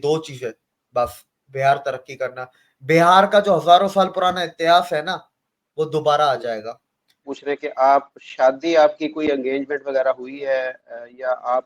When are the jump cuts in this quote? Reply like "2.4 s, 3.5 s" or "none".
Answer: 7.3 s